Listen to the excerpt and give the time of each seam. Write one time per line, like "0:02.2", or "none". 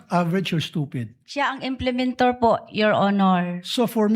0:01.2